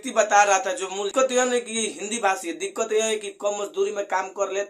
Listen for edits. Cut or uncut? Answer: cut